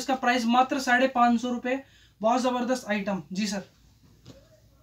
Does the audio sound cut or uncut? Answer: uncut